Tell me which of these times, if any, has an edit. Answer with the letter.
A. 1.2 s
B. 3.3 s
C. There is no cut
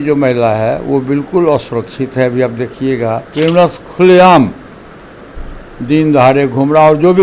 B